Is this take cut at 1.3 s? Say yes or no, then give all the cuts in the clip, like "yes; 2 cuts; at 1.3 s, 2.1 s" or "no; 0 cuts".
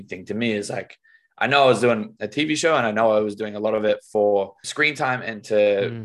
no; 1 cut; at 4.6 s